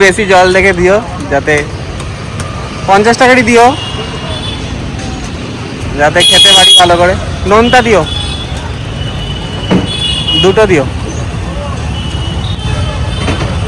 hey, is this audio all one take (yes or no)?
yes